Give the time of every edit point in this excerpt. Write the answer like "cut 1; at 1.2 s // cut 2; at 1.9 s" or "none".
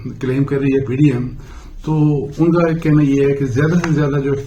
none